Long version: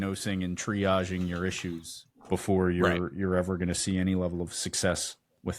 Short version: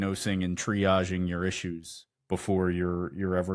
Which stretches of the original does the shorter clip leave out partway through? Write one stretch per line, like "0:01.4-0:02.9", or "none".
none